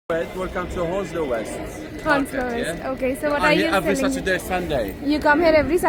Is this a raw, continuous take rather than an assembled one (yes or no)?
yes